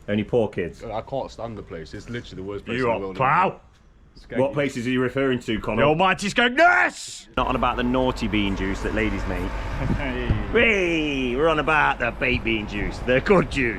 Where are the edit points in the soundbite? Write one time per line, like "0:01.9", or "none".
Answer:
0:07.4

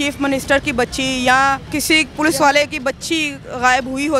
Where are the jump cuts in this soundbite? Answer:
0:01.7

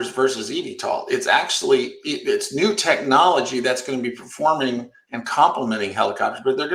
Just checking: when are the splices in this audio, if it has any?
none

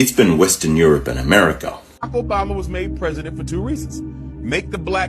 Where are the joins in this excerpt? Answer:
0:02.0

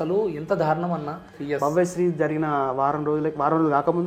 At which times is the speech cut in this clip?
0:01.3

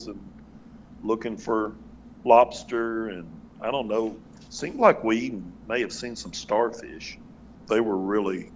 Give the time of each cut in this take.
0:07.5

